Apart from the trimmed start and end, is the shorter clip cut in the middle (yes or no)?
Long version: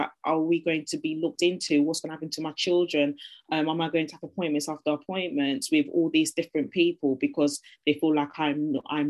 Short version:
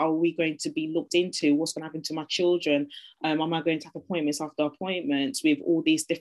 no